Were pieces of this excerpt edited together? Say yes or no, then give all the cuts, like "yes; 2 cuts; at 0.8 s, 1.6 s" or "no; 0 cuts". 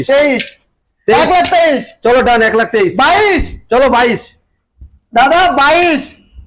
no; 0 cuts